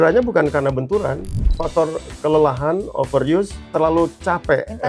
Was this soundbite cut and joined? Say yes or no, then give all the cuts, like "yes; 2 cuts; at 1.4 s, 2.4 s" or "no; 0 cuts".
yes; 2 cuts; at 1.5 s, 3.6 s